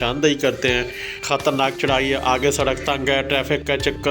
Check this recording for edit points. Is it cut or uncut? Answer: cut